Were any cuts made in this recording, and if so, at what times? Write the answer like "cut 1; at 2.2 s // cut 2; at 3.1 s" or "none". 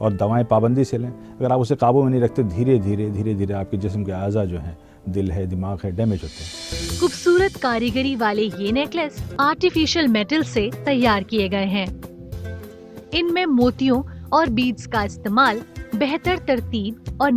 cut 1; at 6.8 s // cut 2; at 9.3 s // cut 3; at 12.2 s